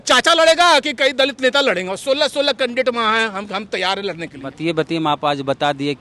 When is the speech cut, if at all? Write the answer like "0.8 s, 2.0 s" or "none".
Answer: none